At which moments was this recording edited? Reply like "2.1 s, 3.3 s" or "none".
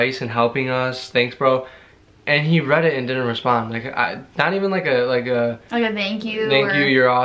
none